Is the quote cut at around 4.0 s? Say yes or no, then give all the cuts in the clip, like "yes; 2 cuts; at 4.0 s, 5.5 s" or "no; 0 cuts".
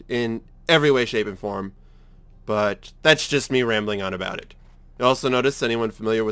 yes; 1 cut; at 4.0 s